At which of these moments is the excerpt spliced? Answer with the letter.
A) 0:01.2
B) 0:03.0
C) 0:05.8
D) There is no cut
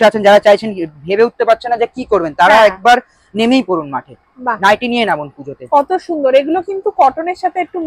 D